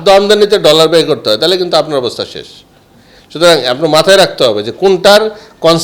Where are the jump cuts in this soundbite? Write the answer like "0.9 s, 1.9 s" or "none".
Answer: none